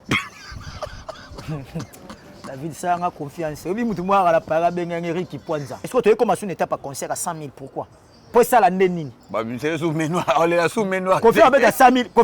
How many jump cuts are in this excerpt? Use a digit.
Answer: 1